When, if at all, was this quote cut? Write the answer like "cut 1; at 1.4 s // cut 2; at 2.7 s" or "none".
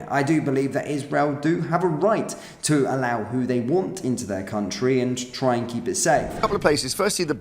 cut 1; at 6.3 s